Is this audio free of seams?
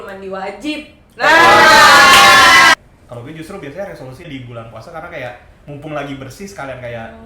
no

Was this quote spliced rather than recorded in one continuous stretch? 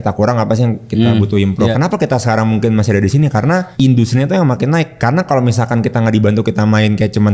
yes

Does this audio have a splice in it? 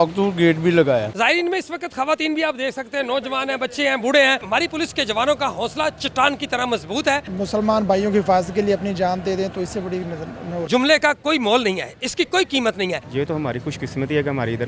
yes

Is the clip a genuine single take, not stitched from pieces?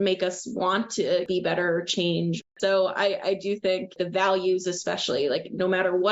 no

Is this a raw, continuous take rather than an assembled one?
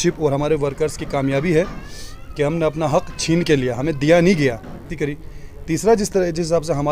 no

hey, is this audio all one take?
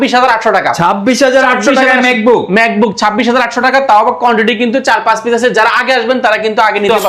yes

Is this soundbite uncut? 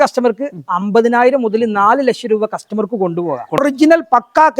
no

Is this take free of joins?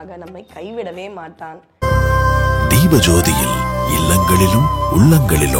no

